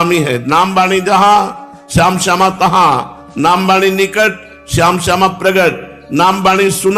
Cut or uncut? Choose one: uncut